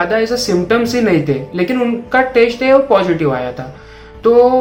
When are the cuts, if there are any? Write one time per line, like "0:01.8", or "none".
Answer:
none